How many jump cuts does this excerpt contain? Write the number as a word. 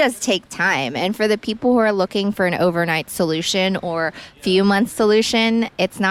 zero